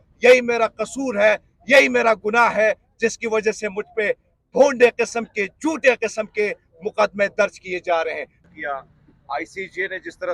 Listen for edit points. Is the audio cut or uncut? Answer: cut